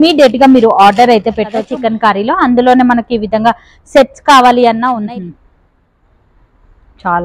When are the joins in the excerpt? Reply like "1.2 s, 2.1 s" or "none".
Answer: 1.6 s, 5.0 s